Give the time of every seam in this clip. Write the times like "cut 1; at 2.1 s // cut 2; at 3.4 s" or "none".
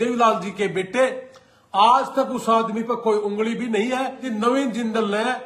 cut 1; at 4.3 s